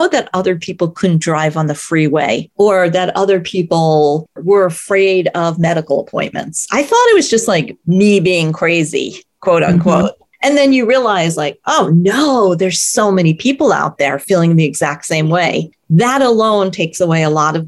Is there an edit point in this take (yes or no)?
yes